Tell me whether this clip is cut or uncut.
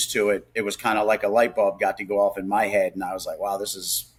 uncut